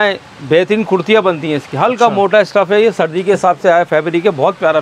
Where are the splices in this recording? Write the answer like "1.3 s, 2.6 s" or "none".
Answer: none